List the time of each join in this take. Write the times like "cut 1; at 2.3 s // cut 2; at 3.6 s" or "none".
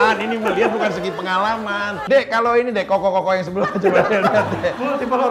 cut 1; at 2.0 s